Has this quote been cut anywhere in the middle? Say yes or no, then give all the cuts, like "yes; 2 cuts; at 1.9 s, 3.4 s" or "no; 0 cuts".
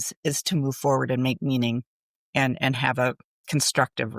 no; 0 cuts